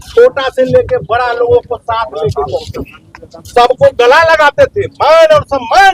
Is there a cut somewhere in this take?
no; 0 cuts

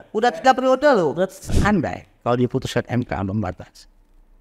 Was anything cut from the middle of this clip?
yes; 1 cut; at 1.5 s

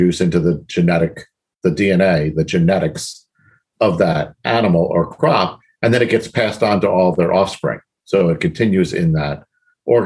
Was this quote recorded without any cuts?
yes; 0 cuts

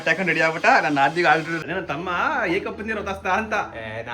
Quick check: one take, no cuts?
no; 1 cut; at 1.5 s

